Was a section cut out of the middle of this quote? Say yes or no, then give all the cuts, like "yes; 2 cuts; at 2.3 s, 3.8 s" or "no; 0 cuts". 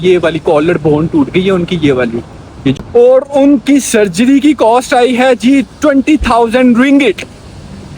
yes; 1 cut; at 2.8 s